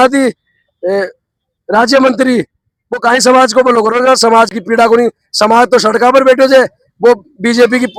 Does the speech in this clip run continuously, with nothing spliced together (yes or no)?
yes